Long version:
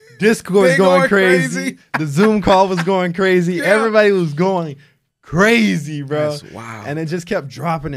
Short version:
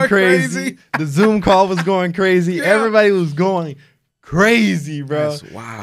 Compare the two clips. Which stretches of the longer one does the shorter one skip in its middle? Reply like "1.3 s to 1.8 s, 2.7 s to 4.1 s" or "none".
none